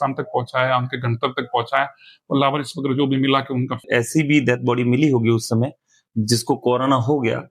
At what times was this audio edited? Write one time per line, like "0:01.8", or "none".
0:03.8